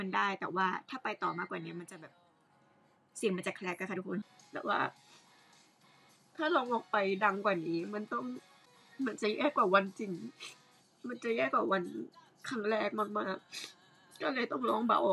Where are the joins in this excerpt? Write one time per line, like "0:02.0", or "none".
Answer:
0:04.2